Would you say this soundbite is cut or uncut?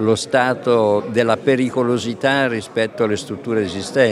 cut